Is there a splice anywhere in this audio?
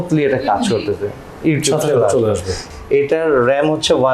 yes; 1 cut; at 2.6 s

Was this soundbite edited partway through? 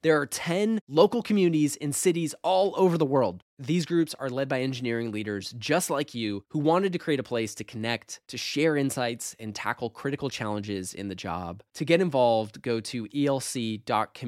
no; 0 cuts

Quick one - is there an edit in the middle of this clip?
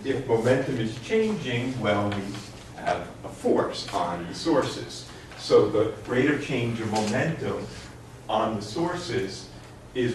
no; 0 cuts

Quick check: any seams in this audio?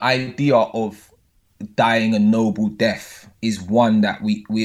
no; 0 cuts

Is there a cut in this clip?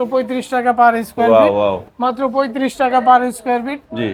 no; 0 cuts

